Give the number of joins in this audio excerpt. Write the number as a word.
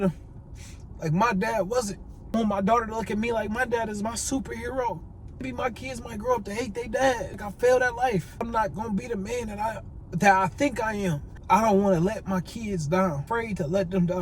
six